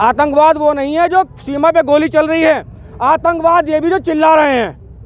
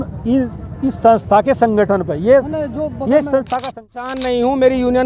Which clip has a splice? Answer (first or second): second